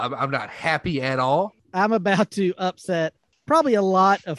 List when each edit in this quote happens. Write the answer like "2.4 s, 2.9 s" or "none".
1.6 s, 3.3 s